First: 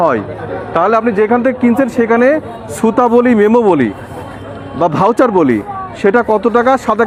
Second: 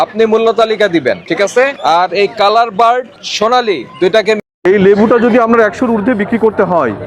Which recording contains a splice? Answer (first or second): second